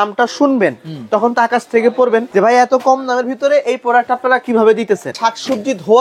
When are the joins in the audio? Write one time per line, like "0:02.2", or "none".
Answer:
0:02.3
0:05.2